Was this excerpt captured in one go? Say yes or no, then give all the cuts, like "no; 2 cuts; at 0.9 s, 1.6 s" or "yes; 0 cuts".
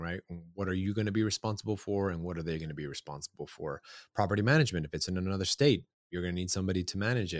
yes; 0 cuts